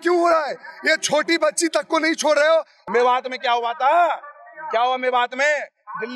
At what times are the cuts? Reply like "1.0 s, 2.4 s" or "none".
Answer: 2.8 s